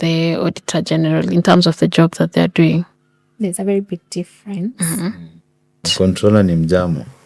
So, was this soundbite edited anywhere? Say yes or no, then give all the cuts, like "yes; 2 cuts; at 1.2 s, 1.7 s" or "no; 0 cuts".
yes; 1 cut; at 5.9 s